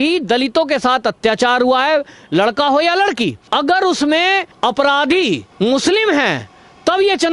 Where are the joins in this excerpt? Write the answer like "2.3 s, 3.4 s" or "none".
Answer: 3.4 s, 4.5 s, 5.5 s